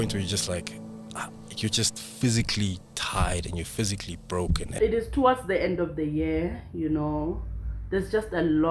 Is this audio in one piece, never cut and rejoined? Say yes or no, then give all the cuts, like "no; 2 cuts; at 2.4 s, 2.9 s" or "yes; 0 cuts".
no; 1 cut; at 4.7 s